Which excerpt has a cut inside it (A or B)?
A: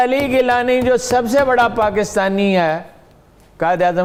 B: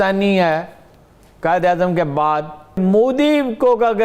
B